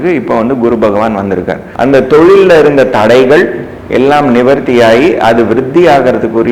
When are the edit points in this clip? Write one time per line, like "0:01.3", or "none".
0:01.6

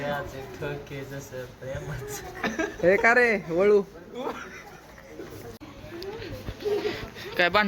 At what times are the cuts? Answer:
0:05.6

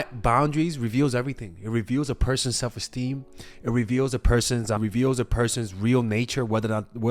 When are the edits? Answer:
0:04.8

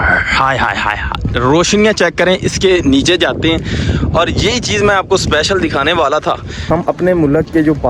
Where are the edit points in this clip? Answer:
0:06.7

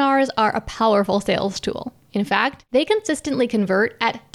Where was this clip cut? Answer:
0:02.3

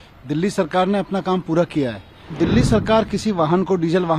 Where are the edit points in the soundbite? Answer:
0:02.3

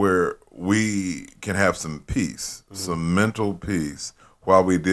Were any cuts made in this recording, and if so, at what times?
none

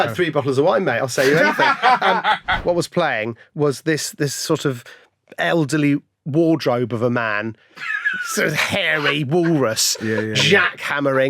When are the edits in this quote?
0:02.5

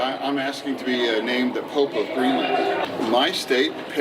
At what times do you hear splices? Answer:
0:02.8

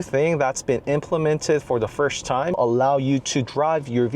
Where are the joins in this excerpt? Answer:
0:02.6

